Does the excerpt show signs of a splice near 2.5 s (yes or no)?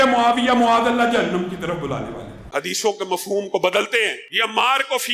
yes